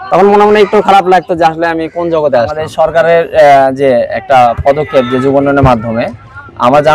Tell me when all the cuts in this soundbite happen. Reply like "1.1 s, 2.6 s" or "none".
2.7 s